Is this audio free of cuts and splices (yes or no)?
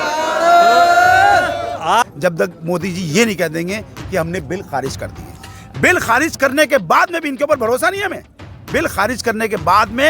no